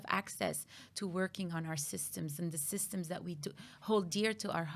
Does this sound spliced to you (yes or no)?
no